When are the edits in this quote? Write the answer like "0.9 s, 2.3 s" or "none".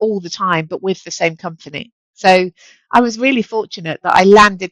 none